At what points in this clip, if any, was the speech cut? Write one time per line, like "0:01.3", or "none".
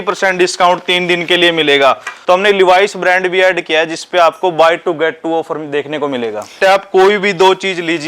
0:02.1
0:06.6

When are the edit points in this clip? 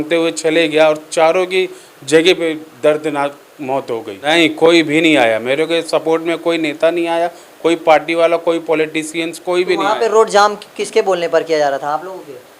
0:04.1

